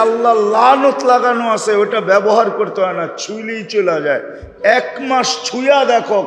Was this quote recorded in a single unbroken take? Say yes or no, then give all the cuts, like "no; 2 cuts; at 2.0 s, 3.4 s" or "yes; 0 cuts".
yes; 0 cuts